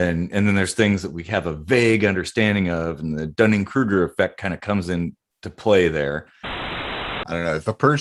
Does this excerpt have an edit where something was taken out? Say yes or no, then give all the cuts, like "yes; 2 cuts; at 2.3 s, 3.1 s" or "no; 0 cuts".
yes; 1 cut; at 6.8 s